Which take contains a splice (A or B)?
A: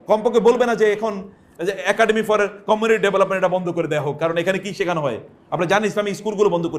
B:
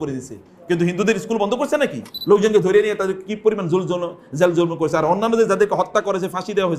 B